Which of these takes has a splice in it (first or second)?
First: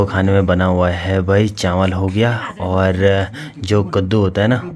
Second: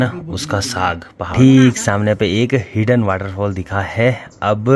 second